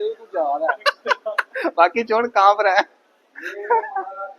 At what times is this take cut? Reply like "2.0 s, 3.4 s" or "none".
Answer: none